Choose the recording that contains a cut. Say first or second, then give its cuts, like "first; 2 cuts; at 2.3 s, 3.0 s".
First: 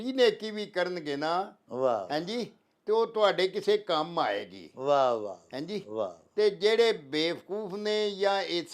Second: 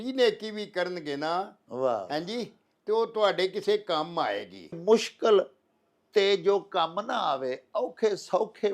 second; 1 cut; at 4.8 s